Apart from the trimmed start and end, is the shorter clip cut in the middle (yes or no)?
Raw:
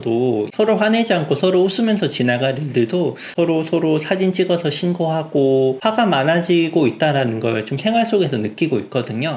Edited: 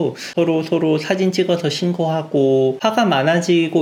no